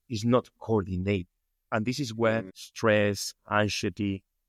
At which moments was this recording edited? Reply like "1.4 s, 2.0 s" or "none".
none

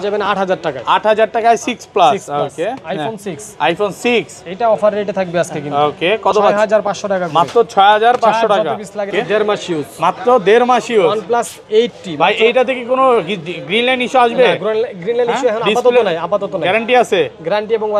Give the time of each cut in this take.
9.1 s

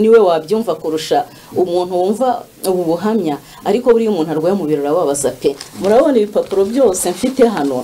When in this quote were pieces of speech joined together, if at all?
none

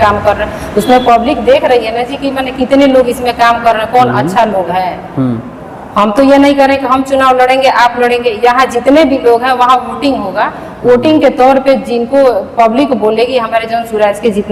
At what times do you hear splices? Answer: none

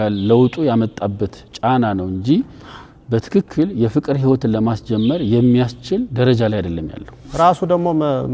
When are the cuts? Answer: 7.3 s

